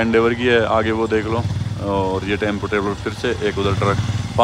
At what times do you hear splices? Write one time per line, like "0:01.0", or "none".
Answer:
none